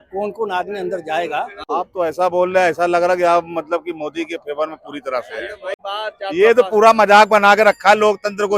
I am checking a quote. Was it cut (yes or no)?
yes